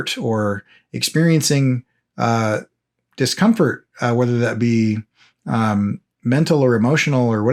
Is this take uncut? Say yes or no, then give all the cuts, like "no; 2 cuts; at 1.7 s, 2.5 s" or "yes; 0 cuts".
yes; 0 cuts